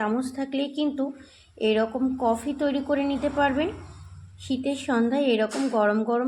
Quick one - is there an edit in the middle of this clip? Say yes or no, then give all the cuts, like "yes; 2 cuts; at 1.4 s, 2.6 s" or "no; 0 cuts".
no; 0 cuts